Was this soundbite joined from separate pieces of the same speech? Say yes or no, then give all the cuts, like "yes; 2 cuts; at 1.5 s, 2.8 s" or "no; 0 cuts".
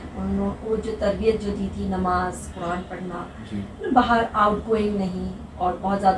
no; 0 cuts